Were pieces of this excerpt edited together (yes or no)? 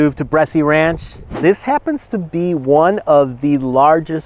yes